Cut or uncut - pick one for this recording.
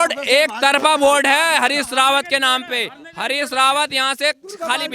uncut